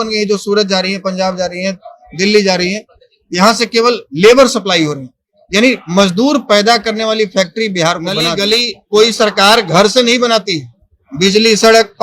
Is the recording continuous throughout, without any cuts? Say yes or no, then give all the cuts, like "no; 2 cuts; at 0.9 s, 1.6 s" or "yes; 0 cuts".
no; 1 cut; at 8.3 s